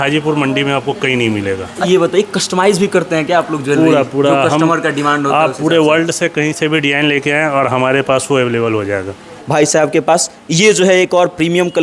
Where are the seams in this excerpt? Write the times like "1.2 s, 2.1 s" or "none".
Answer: 1.8 s, 9.3 s